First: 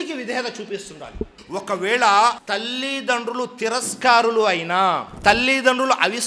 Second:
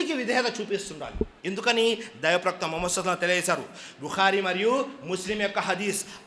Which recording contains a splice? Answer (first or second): first